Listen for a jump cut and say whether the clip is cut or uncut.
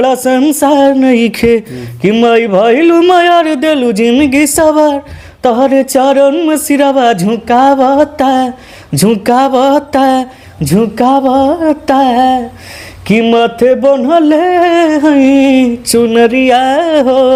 uncut